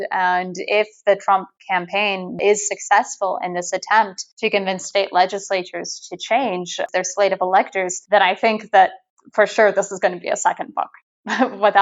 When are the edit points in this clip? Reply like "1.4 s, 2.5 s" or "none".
4.2 s, 6.8 s, 7.9 s